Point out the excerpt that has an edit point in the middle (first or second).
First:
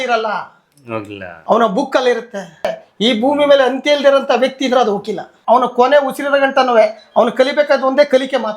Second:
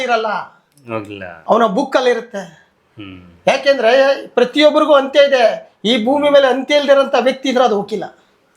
first